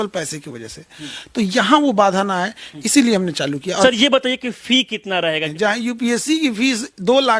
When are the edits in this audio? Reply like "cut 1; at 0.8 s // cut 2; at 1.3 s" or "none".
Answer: cut 1; at 3.8 s // cut 2; at 5.5 s